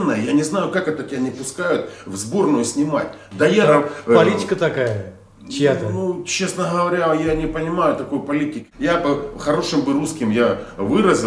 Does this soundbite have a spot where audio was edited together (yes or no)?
yes